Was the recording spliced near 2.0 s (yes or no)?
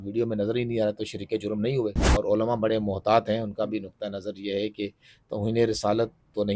yes